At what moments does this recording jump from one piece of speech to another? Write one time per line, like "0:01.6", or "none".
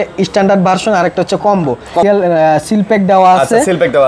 0:02.0